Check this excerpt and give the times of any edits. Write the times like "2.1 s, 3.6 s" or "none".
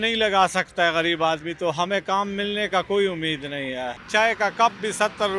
4.0 s